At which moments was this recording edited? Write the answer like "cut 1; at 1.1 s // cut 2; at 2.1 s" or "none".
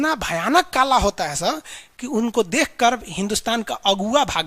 none